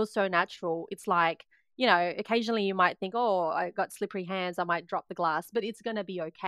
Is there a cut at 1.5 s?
no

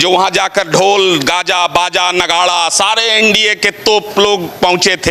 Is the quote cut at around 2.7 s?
no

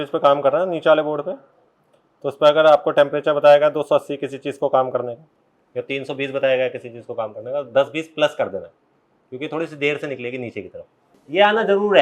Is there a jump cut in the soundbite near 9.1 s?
no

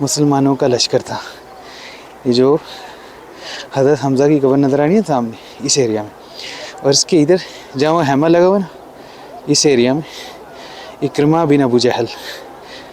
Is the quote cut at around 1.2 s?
no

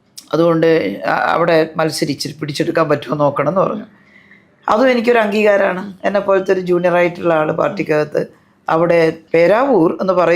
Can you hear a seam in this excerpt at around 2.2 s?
no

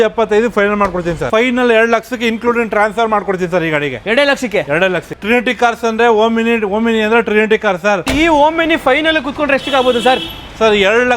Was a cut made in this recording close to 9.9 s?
no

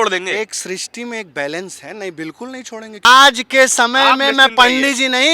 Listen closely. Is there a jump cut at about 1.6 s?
no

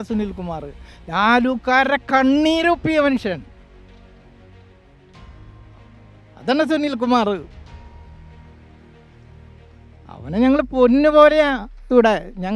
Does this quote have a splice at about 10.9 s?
no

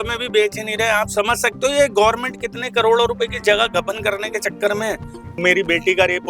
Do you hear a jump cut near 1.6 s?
no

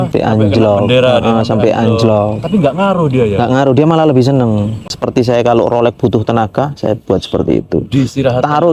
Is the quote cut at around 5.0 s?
yes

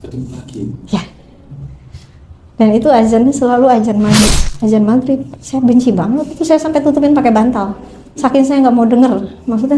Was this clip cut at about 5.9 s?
no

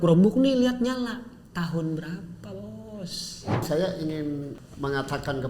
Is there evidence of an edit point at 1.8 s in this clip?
no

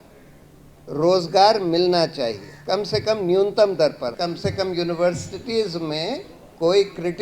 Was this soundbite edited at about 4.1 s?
yes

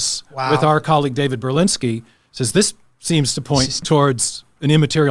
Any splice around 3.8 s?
yes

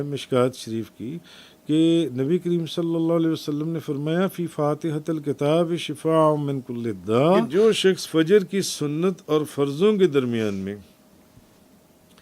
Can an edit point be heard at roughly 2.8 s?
no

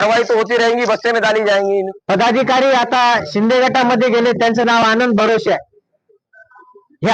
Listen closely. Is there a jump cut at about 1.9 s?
yes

